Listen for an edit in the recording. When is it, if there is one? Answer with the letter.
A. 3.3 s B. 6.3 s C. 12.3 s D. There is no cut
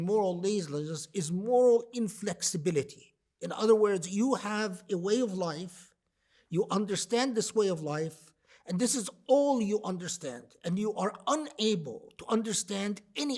D